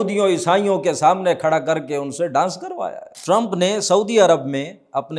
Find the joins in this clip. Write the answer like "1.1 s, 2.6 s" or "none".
3.2 s